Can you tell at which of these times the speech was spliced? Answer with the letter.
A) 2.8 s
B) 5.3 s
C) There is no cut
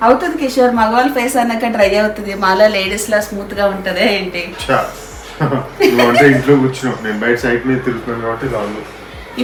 C